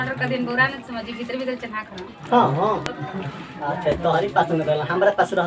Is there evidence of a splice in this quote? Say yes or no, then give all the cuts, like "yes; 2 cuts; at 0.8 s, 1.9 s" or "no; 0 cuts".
no; 0 cuts